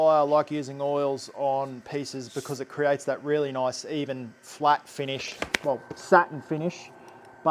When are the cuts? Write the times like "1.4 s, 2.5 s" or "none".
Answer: none

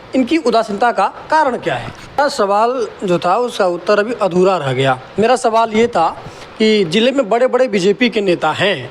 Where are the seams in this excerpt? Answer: 2.2 s

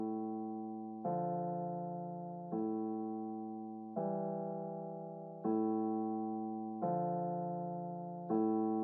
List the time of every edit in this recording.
0.9 s

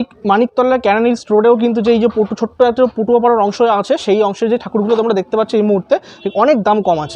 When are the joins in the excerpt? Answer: 6.1 s

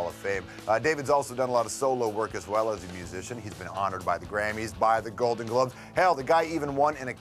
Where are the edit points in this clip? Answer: 2.3 s

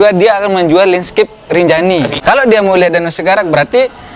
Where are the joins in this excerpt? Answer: 2.1 s

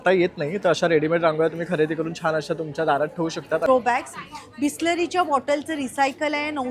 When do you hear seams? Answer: 3.7 s

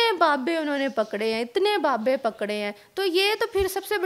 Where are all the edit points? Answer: none

